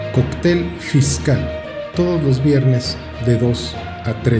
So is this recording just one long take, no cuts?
no; 1 cut; at 1.6 s

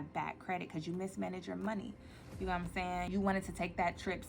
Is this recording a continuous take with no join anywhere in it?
no; 1 cut; at 3.1 s

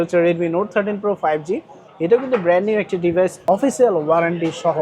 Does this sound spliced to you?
yes; 1 cut; at 3.4 s

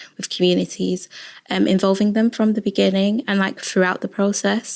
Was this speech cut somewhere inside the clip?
no; 0 cuts

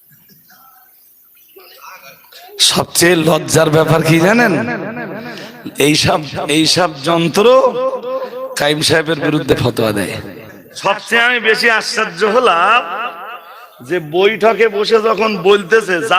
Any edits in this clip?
yes; 1 cut; at 10.8 s

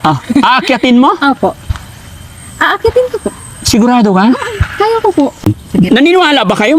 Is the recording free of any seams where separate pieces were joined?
no; 1 cut; at 5.6 s

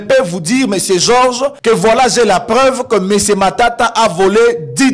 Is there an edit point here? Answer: yes; 1 cut; at 1.6 s

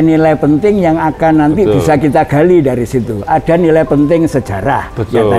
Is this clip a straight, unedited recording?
yes; 0 cuts

